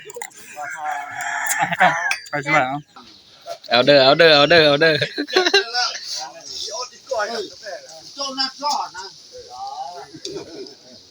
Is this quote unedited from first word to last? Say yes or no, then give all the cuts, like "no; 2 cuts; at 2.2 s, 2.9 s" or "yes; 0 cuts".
no; 1 cut; at 3.0 s